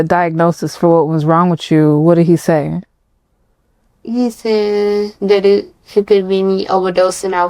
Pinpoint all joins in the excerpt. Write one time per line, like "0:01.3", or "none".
none